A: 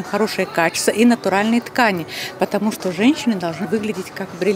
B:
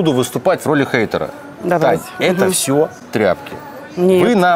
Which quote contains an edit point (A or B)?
A